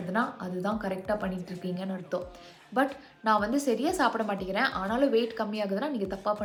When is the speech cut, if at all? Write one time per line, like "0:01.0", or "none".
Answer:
none